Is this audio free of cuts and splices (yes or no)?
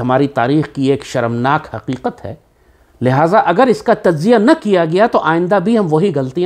yes